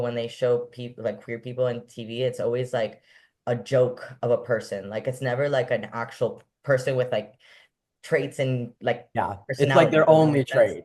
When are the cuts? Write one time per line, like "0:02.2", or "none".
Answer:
none